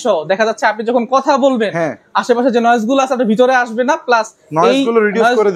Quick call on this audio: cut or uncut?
uncut